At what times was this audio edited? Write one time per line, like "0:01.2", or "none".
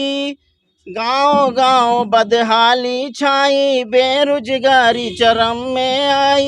none

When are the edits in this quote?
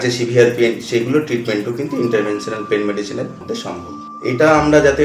0:03.5

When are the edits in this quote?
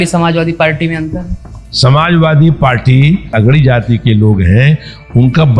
0:01.6
0:03.3

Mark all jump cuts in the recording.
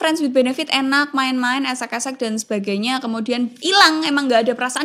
none

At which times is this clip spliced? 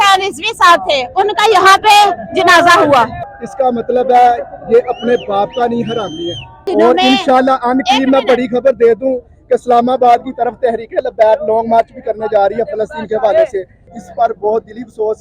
0:03.2
0:06.6
0:13.9

